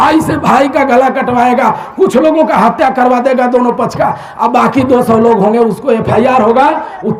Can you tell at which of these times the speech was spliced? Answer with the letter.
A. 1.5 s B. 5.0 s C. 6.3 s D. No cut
D